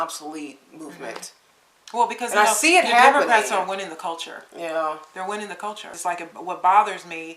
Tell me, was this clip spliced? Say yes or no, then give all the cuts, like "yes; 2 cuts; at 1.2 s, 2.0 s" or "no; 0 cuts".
yes; 1 cut; at 5.9 s